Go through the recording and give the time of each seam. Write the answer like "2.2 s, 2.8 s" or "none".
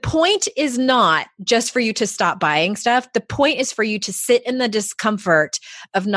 none